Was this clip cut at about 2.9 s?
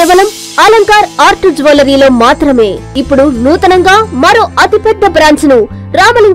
yes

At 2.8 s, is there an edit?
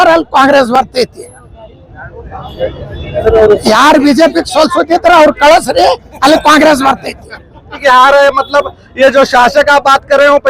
no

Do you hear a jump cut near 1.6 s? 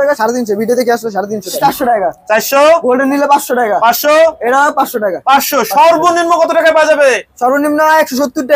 yes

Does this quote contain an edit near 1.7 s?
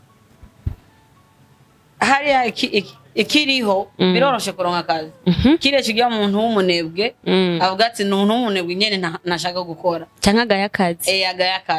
no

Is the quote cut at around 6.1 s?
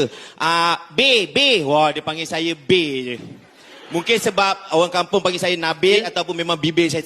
yes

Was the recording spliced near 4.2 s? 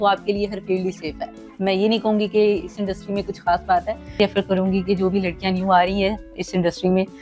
yes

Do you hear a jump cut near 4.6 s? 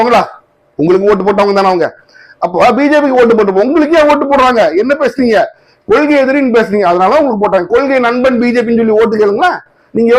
no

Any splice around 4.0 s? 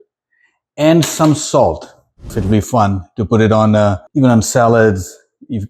yes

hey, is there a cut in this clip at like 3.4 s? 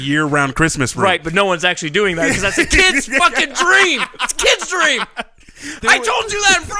no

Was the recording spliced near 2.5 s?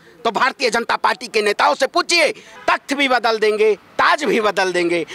yes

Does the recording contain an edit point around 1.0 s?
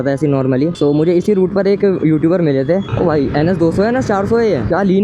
no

